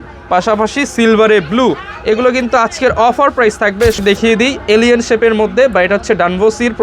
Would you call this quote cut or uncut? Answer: cut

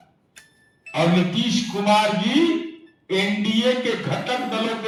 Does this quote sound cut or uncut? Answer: uncut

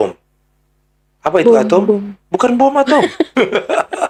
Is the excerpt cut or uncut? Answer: uncut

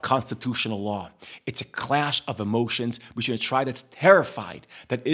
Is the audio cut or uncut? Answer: uncut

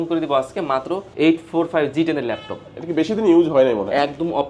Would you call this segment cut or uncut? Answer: cut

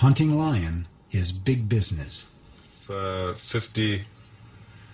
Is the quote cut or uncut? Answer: cut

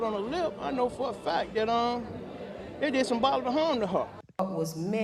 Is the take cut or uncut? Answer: uncut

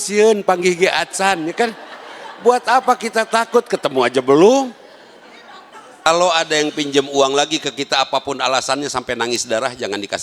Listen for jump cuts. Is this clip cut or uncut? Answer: cut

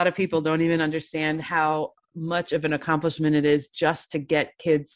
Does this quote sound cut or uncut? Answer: uncut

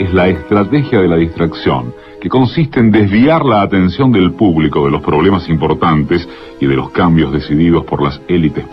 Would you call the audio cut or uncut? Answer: uncut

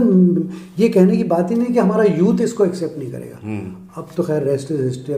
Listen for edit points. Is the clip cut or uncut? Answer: uncut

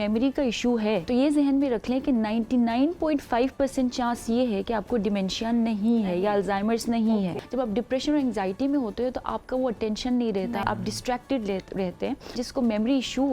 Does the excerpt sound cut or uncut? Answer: cut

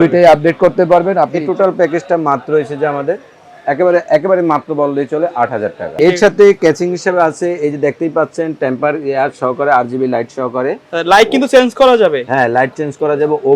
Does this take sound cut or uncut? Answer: cut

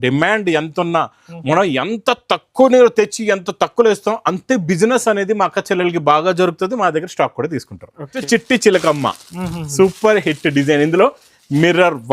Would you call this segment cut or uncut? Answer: cut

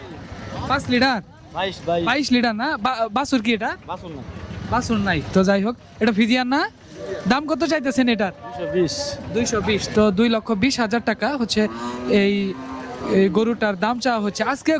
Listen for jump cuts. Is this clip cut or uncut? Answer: uncut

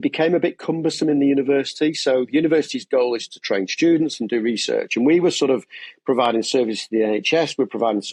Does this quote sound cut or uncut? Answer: uncut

